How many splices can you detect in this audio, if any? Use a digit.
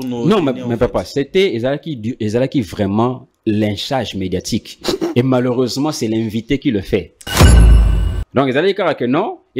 1